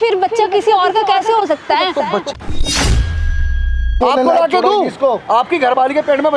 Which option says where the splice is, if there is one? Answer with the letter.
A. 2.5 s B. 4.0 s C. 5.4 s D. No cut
B